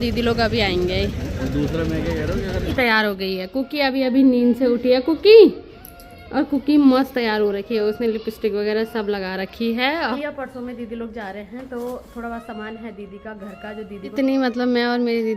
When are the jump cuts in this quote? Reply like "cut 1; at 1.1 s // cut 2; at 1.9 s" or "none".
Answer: cut 1; at 2.7 s // cut 2; at 10.2 s // cut 3; at 14.1 s